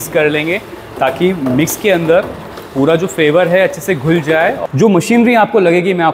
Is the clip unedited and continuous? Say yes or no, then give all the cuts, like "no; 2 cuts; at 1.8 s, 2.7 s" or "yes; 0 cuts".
no; 1 cut; at 4.6 s